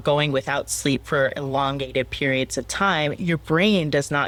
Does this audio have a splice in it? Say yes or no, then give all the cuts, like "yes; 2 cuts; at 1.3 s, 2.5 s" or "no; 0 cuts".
no; 0 cuts